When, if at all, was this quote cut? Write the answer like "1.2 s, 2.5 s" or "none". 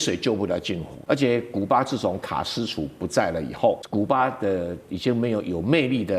0.9 s, 3.8 s